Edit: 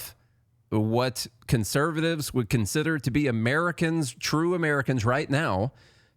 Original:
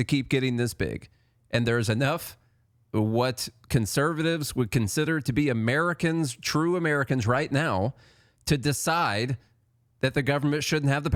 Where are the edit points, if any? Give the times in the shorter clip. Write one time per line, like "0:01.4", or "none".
none